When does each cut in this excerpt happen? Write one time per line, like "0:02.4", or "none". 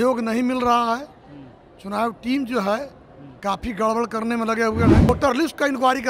0:05.1

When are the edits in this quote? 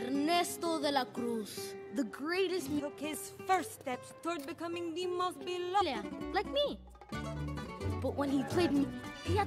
none

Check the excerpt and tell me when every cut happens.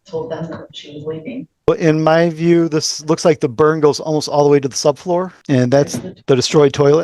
0:01.7
0:05.4
0:06.1

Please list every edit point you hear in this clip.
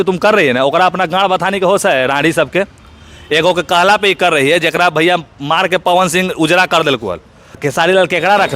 0:07.6

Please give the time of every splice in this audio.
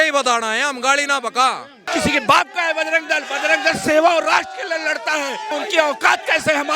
0:01.8
0:05.5

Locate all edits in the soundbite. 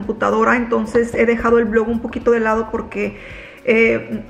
none

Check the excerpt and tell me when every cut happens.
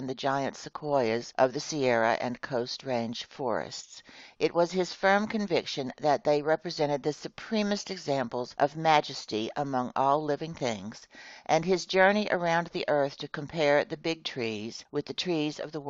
none

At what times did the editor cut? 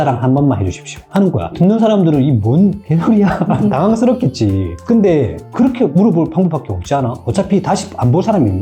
none

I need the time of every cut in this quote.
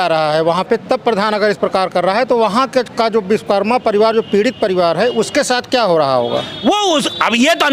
none

